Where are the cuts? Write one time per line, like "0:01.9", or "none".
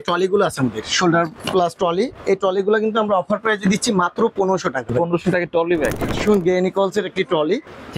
0:01.4
0:04.8
0:06.2